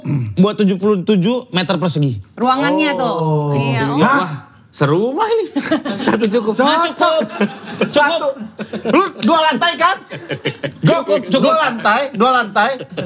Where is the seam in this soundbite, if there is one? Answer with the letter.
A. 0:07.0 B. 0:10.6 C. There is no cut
C